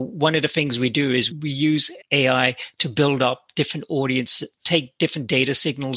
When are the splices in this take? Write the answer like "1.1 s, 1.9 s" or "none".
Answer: 1.3 s